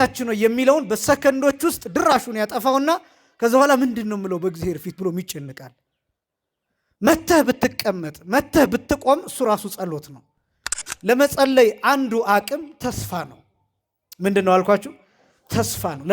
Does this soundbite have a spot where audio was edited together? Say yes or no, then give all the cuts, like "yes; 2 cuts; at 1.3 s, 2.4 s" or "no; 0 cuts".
yes; 1 cut; at 10.7 s